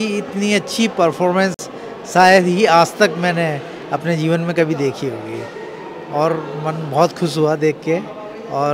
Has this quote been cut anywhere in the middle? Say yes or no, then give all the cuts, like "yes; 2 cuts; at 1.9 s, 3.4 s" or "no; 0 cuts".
no; 0 cuts